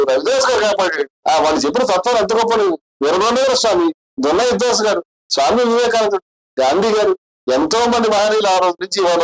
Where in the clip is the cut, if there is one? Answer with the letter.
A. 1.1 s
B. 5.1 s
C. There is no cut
A